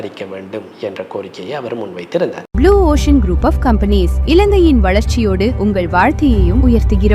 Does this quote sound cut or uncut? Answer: cut